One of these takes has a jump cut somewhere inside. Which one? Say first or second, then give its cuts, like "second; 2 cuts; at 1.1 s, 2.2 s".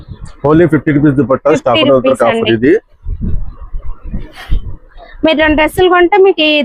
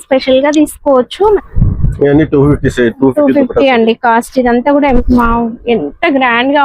second; 2 cuts; at 1.4 s, 5.0 s